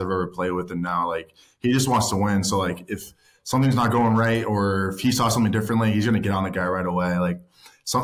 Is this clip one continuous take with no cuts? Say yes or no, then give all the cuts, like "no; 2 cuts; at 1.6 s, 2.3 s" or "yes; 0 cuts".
yes; 0 cuts